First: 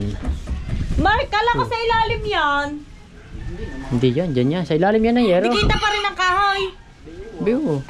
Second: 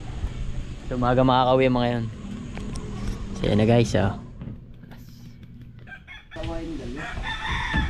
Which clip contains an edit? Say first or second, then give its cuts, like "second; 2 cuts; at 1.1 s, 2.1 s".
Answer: second; 1 cut; at 6.4 s